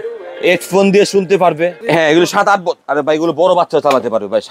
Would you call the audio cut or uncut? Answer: cut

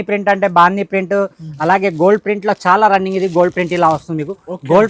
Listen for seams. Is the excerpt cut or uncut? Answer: uncut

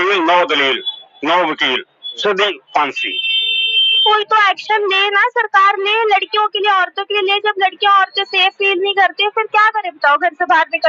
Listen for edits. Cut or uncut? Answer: cut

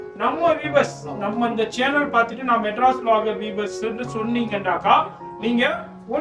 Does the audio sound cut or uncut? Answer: uncut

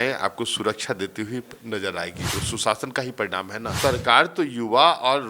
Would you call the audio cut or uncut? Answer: cut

